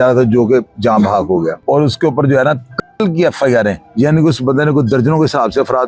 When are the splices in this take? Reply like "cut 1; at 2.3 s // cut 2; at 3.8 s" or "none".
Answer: cut 1; at 1.6 s // cut 2; at 3.8 s